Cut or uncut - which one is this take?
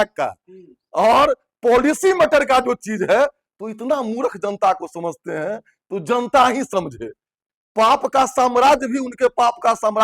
cut